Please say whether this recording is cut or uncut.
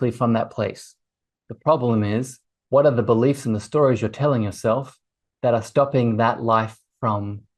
cut